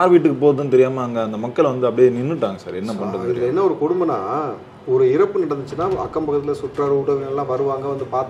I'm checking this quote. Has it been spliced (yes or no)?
no